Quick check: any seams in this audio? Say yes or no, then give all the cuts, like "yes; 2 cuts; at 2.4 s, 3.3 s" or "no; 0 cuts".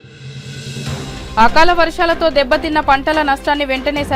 yes; 1 cut; at 1.0 s